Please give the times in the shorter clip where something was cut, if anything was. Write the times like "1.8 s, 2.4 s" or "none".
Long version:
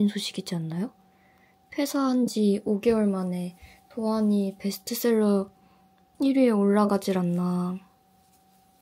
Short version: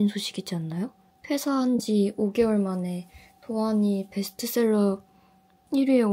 1.1 s